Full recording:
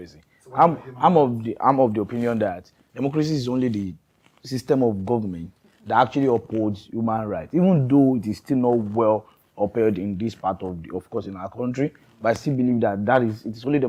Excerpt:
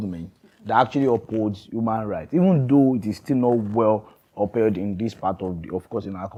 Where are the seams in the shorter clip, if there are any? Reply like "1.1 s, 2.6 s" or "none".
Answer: none